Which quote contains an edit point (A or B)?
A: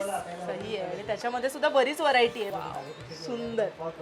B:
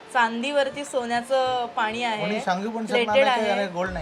A